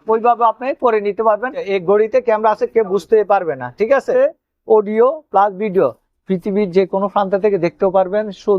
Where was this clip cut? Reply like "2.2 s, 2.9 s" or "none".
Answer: 1.7 s, 4.1 s